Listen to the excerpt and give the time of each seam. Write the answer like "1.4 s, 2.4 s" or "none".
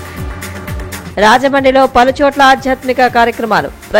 1.0 s